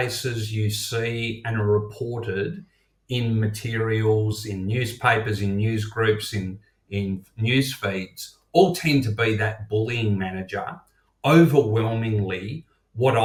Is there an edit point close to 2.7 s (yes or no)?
no